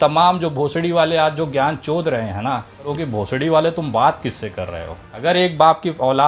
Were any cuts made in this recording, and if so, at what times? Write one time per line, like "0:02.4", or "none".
0:02.9
0:05.1